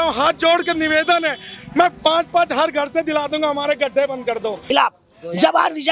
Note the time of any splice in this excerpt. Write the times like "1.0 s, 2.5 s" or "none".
4.6 s